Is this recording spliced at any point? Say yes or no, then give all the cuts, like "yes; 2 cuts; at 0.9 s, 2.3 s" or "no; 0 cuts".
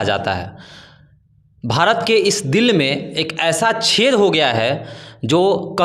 no; 0 cuts